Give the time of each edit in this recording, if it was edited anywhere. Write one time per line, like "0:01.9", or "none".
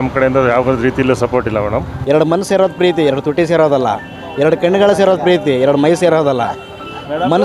0:01.9